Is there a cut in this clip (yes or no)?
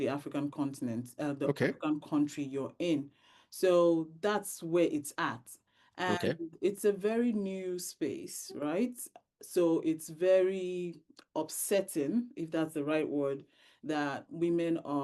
no